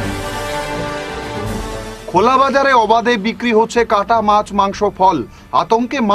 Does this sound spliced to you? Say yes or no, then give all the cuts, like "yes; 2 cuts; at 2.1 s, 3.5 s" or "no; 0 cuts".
yes; 1 cut; at 1.5 s